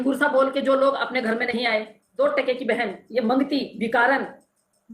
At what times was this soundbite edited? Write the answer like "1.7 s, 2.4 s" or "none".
2.0 s